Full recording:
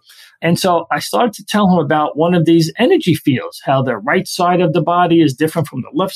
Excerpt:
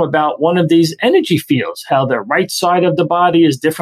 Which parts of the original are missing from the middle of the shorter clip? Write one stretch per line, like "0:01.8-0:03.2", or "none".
none